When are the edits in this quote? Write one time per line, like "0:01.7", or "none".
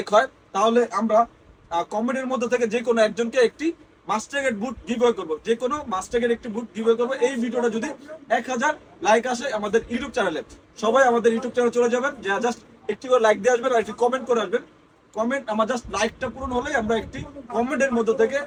none